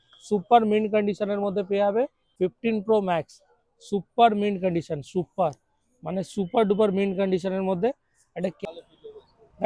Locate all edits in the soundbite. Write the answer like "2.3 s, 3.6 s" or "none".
2.3 s, 8.6 s